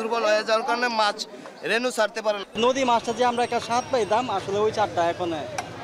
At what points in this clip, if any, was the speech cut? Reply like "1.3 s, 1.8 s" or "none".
2.4 s